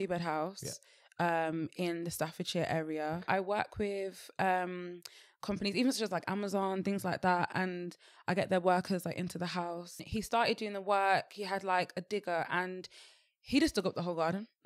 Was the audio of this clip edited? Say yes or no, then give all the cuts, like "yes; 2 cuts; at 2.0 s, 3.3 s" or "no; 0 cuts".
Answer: yes; 2 cuts; at 3.3 s, 10.0 s